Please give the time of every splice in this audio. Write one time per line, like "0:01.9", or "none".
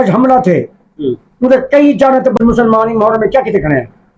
0:02.4